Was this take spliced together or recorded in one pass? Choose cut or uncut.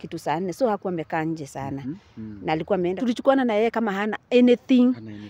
cut